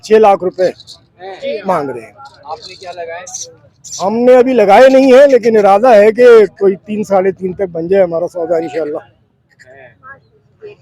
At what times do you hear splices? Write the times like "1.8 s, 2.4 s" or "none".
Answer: none

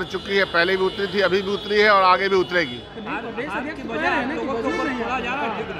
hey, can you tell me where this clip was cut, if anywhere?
none

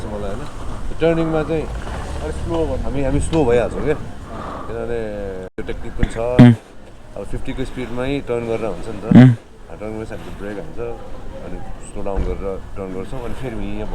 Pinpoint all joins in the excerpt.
5.6 s

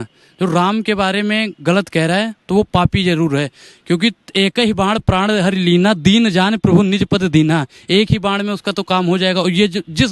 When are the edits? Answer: none

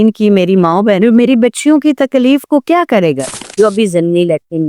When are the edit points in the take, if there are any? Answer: 3.4 s

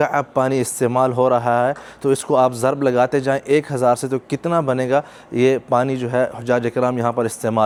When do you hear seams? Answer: none

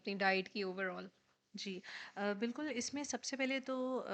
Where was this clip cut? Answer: none

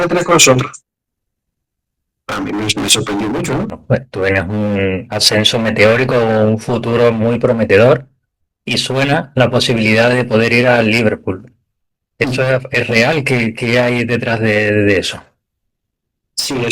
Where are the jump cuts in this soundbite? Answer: 3.8 s

